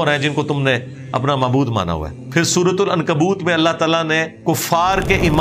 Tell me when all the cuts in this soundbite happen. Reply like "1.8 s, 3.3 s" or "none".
2.2 s, 4.3 s